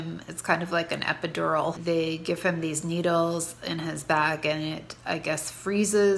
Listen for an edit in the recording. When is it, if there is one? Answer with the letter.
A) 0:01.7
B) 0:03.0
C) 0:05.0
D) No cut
A